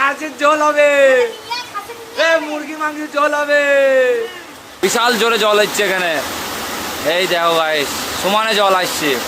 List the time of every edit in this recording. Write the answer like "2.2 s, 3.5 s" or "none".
4.7 s

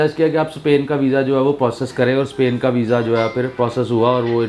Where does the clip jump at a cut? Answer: none

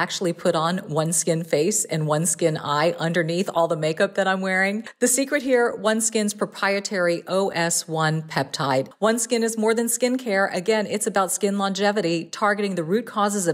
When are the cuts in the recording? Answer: 4.9 s, 8.9 s

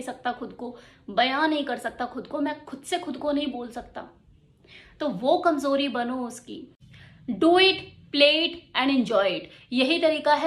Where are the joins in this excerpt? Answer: 6.9 s

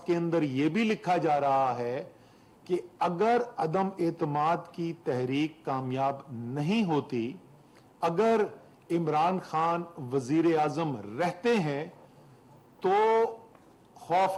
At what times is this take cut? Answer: none

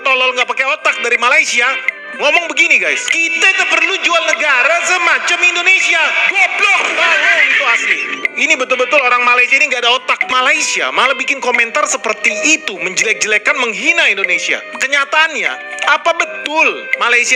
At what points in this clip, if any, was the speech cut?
10.3 s

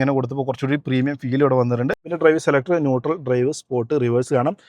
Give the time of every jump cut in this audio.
2.1 s

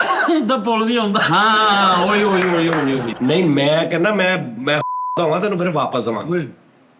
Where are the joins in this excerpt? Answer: 3.1 s

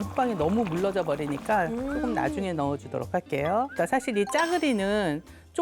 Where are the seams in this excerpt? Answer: none

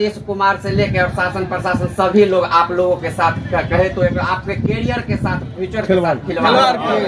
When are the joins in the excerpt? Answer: none

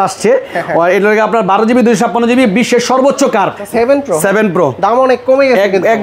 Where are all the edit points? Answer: 3.6 s

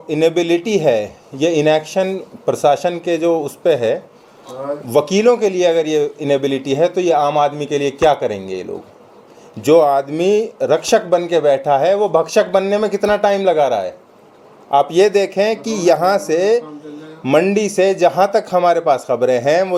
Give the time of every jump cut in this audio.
none

